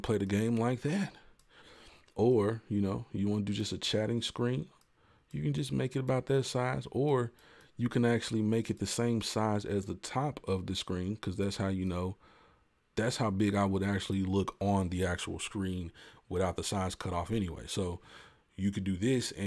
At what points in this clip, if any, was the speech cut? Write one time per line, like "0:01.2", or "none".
none